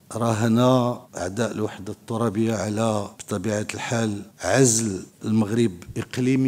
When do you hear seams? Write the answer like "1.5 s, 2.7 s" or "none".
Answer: 1.1 s, 3.2 s, 4.3 s, 5.1 s

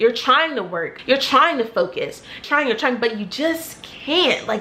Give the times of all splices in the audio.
0.9 s, 2.4 s

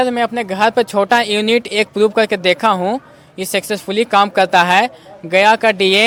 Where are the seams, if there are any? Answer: none

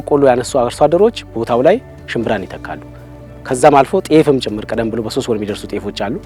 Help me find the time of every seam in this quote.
none

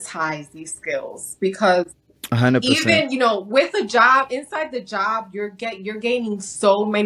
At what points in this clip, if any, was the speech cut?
none

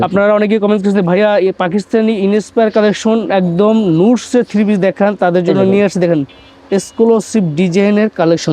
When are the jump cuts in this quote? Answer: none

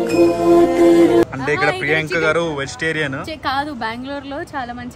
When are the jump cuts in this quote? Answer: 1.2 s

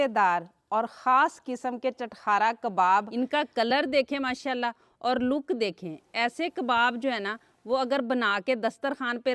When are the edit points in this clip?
3.1 s

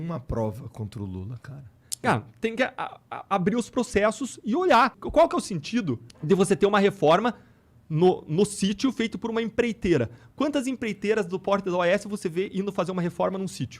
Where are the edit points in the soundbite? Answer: 5.0 s, 6.1 s

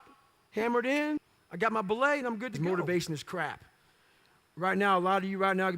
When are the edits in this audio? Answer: 1.4 s, 2.6 s

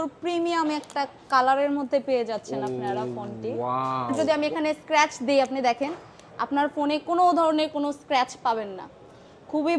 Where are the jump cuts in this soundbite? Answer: 4.1 s

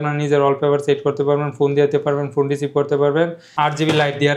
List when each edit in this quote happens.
3.4 s

